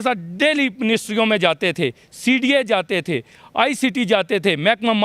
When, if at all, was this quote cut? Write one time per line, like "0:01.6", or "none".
none

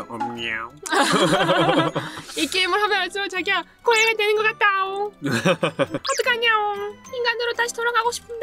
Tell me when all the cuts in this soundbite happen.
0:05.2

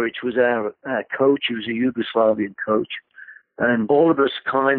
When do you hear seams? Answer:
0:03.9

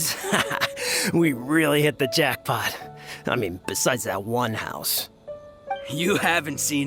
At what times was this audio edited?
none

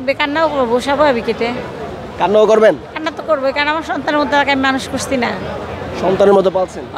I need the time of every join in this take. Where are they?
none

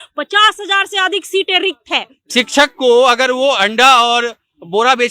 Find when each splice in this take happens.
0:02.2

